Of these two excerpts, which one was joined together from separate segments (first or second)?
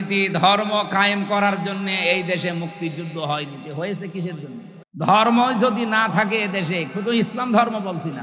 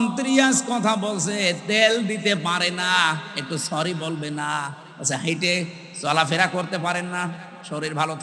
first